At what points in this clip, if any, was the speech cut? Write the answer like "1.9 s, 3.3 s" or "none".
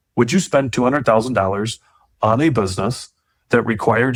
none